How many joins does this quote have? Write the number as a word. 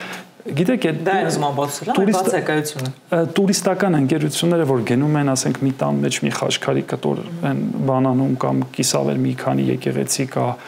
zero